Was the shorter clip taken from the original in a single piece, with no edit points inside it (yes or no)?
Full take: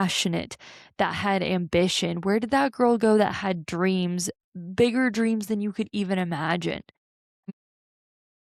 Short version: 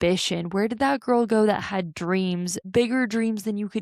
no